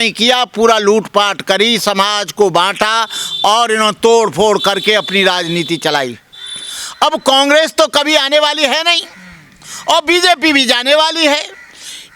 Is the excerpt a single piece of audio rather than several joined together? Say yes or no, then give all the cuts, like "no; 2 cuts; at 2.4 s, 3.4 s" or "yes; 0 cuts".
yes; 0 cuts